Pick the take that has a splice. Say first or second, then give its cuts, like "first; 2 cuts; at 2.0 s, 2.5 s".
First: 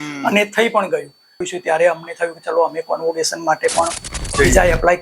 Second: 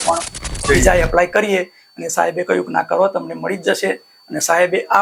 first; 1 cut; at 1.5 s